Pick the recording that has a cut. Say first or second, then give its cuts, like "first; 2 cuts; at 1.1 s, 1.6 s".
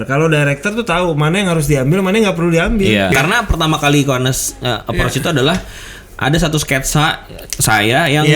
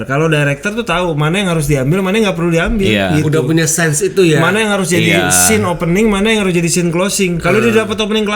first; 1 cut; at 3.1 s